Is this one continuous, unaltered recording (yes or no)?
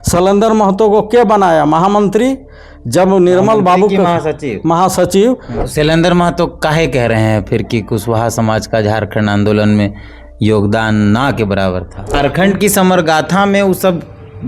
no